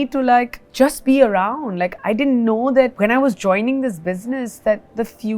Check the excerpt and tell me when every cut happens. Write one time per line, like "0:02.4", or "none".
none